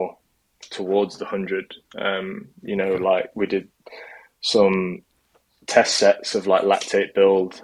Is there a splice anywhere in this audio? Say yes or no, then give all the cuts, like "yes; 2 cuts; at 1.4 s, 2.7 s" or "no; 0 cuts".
no; 0 cuts